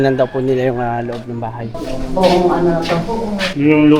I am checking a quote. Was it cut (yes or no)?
yes